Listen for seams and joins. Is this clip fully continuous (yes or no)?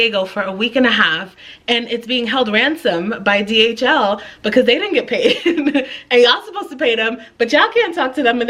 yes